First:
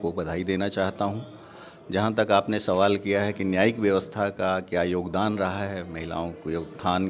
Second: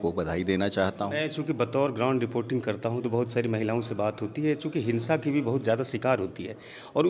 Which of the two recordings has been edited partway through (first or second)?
second